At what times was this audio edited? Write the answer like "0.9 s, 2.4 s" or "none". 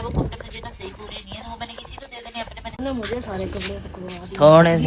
2.8 s

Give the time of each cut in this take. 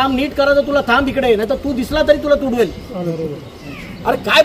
3.3 s

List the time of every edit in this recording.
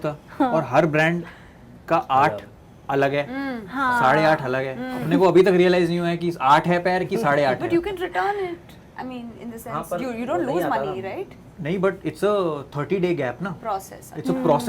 none

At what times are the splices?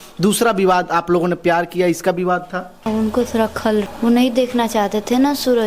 2.9 s, 3.9 s

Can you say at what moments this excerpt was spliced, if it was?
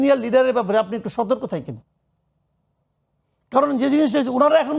none

